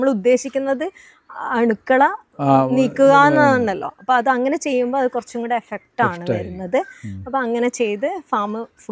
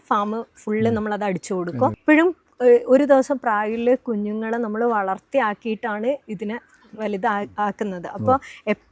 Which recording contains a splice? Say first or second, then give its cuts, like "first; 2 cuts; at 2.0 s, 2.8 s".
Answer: second; 1 cut; at 2.0 s